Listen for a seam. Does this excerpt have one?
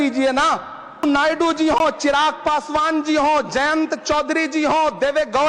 yes; 1 cut; at 1.0 s

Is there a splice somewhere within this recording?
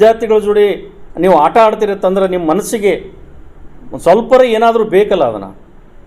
no; 0 cuts

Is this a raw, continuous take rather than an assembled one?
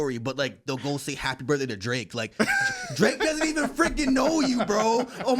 yes; 0 cuts

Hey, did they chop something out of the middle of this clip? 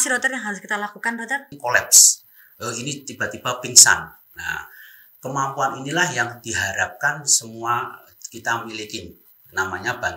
yes; 1 cut; at 1.6 s

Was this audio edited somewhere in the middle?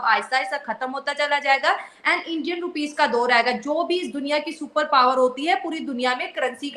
no; 0 cuts

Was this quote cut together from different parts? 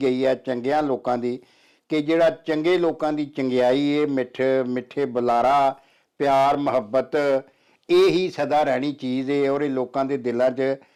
no; 0 cuts

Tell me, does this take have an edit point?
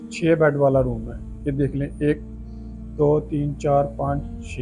no; 0 cuts

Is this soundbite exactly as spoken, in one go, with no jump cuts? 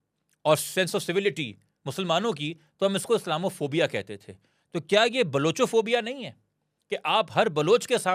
yes; 0 cuts

